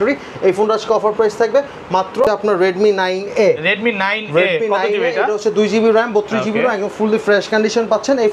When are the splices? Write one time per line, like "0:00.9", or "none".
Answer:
0:02.2